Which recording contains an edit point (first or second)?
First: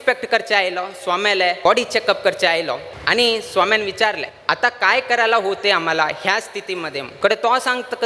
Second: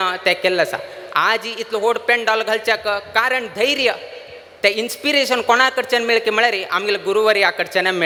first